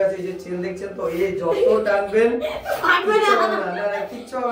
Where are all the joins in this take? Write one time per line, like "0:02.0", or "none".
none